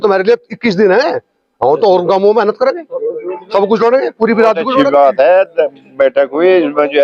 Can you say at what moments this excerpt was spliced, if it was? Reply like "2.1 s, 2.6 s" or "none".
4.7 s